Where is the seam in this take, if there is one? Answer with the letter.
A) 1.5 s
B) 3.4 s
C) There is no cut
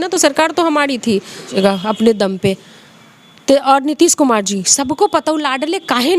A